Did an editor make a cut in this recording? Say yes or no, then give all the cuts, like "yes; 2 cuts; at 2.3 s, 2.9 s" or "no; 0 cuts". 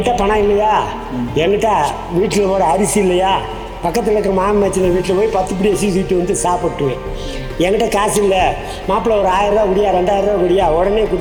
no; 0 cuts